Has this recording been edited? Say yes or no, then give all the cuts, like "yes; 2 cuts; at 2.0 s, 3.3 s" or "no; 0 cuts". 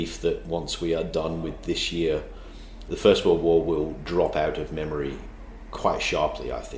no; 0 cuts